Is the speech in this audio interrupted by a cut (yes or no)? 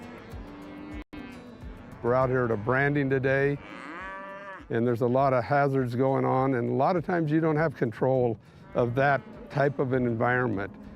yes